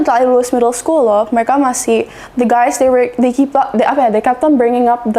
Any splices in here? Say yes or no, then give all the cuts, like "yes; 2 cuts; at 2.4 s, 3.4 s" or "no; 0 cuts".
no; 0 cuts